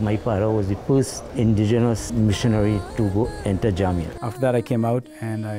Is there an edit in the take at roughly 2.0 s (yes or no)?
yes